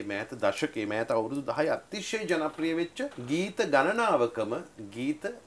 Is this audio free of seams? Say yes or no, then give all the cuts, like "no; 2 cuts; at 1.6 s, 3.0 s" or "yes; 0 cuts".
no; 1 cut; at 3.2 s